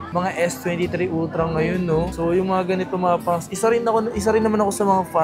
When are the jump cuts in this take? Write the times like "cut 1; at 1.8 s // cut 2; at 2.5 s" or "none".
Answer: none